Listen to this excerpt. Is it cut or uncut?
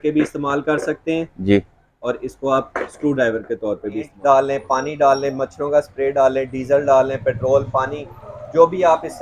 cut